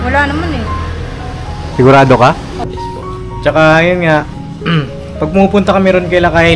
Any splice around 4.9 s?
no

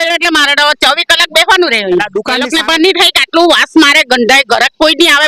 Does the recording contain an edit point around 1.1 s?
no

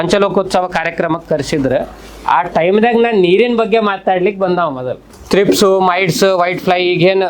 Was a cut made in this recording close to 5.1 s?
yes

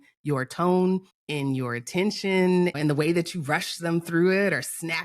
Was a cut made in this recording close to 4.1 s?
no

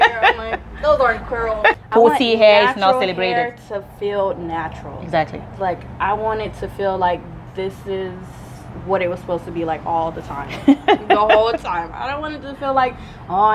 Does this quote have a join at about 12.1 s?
no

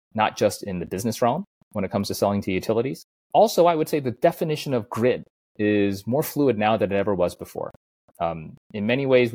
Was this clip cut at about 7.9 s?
no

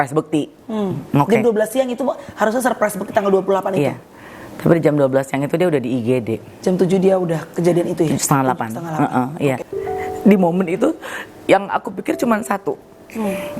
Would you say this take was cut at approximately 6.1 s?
no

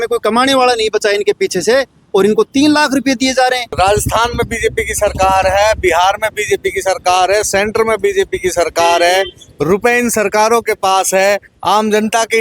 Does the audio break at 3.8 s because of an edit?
yes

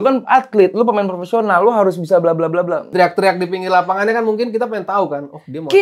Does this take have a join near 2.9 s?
yes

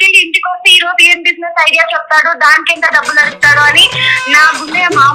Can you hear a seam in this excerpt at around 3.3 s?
no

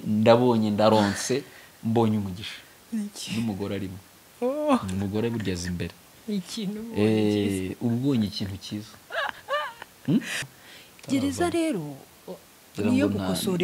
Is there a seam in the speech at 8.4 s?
no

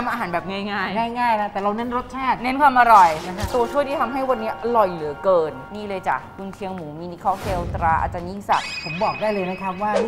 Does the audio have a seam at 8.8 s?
yes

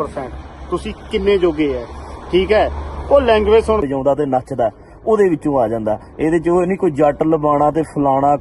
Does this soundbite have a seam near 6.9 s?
no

